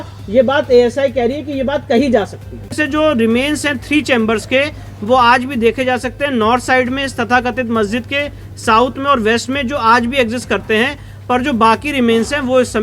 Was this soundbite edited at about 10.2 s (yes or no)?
no